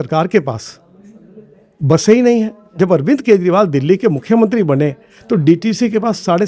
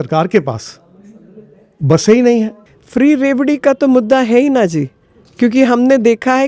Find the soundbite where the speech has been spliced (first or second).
second